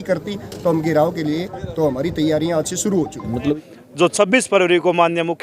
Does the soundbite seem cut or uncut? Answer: cut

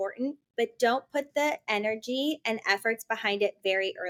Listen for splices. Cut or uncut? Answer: uncut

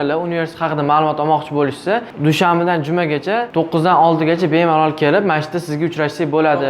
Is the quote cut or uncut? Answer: cut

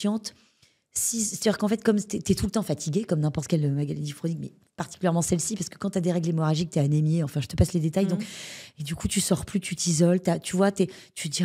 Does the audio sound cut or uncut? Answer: uncut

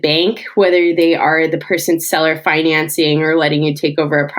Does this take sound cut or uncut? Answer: uncut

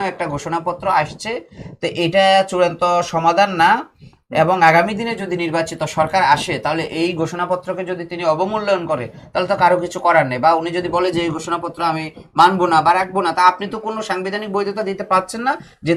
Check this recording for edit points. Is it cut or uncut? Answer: uncut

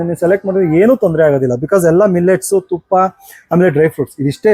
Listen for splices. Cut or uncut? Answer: uncut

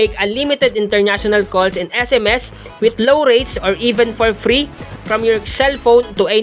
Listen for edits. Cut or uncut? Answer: uncut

